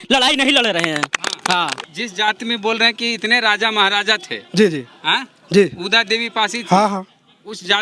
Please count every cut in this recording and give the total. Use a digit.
1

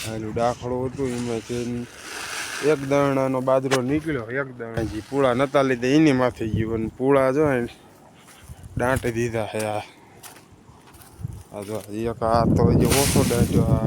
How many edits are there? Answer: 1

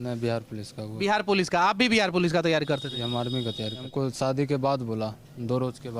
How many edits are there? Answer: 1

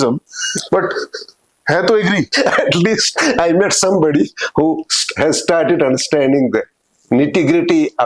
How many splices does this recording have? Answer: 1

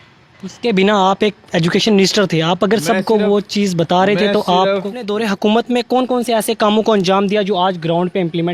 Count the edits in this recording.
1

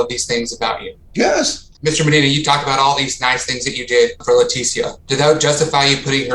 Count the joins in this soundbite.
1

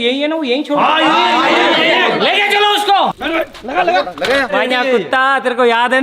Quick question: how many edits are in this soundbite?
2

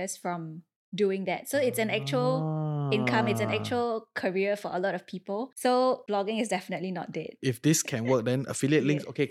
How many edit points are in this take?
1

